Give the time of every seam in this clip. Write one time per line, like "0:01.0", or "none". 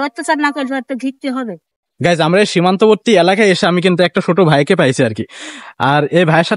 0:01.8